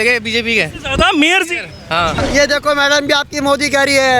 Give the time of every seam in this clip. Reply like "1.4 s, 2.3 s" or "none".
2.2 s